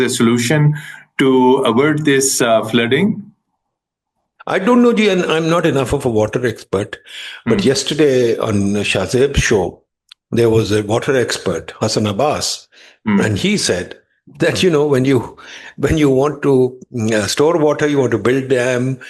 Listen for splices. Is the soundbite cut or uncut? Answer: uncut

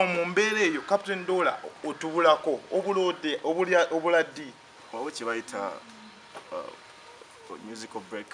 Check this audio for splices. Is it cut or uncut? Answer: uncut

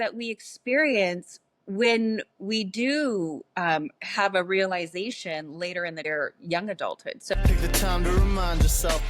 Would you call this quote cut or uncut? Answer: cut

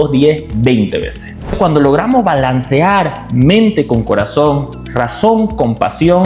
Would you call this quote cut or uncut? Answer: cut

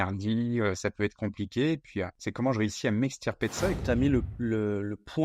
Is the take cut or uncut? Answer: cut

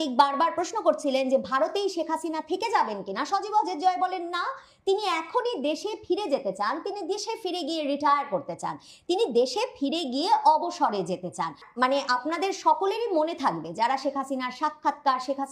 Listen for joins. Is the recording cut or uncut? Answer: cut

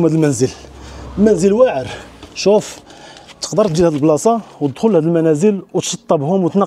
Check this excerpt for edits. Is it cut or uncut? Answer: uncut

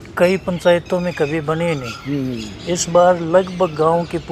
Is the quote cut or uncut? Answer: uncut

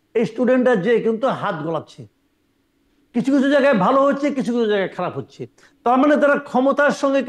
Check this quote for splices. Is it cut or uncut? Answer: uncut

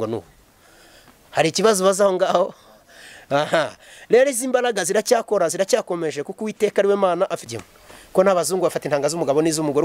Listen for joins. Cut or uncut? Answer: cut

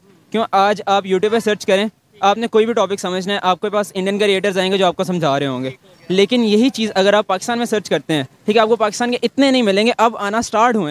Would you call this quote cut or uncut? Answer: uncut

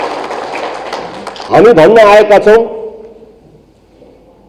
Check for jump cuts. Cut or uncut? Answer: cut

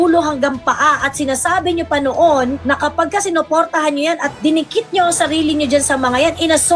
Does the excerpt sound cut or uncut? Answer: uncut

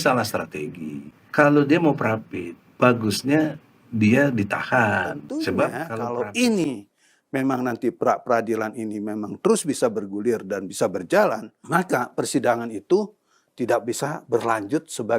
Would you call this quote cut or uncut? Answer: cut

